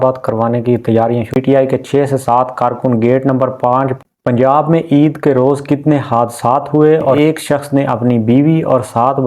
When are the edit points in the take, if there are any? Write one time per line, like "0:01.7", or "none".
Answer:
0:01.3
0:04.0
0:07.2